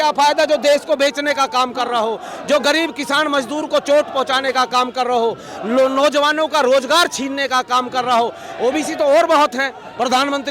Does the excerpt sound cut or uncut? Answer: uncut